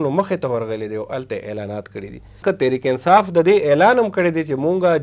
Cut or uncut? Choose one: cut